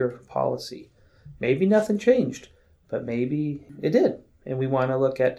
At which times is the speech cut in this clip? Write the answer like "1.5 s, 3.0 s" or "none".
3.6 s